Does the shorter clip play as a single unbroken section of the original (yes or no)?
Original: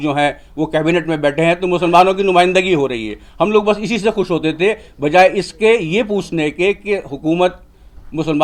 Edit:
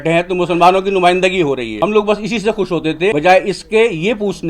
no